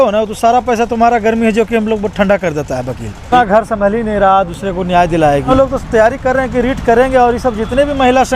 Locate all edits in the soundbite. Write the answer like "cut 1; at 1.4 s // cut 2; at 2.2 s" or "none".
cut 1; at 3.3 s // cut 2; at 5.5 s